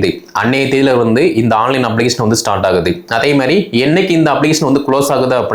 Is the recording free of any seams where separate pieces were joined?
yes; 0 cuts

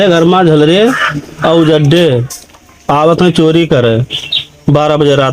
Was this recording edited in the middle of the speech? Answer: no; 0 cuts

